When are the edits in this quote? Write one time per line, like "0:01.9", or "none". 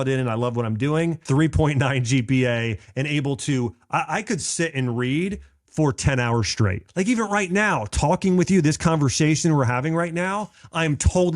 0:01.2
0:06.8